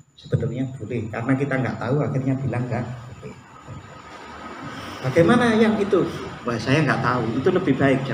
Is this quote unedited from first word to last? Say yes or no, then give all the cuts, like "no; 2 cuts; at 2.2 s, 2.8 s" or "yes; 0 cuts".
yes; 0 cuts